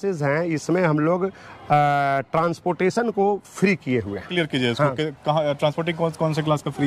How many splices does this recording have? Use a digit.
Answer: 0